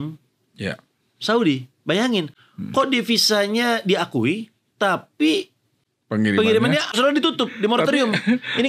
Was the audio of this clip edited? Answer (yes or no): yes